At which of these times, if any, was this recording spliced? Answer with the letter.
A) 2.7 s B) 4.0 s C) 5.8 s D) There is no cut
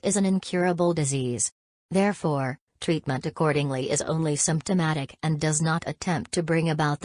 C